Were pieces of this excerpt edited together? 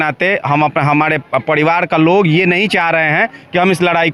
no; 0 cuts

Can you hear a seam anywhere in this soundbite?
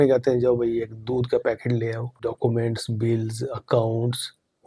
yes; 1 cut; at 2.2 s

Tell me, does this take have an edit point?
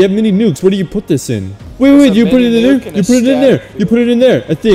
yes; 1 cut; at 1.7 s

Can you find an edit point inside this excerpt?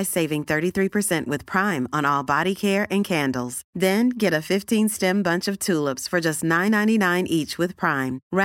no; 0 cuts

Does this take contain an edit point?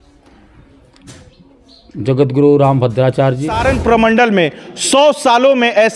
yes; 1 cut; at 3.6 s

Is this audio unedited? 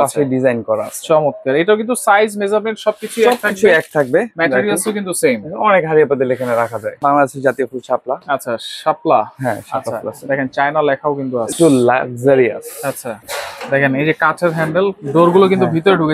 no; 3 cuts; at 7.0 s, 11.5 s, 13.3 s

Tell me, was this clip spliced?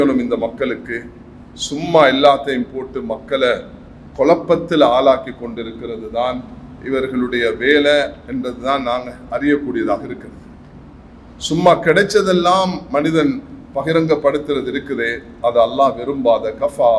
no; 0 cuts

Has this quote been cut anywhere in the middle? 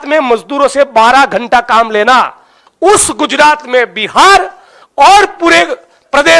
yes; 1 cut; at 2.6 s

